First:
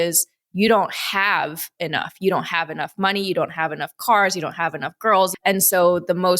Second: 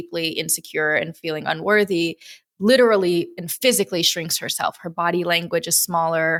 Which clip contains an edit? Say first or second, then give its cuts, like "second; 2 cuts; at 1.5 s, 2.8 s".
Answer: first; 1 cut; at 5.3 s